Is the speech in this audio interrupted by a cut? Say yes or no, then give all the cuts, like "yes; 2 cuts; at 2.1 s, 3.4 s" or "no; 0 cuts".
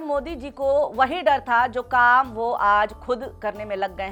no; 0 cuts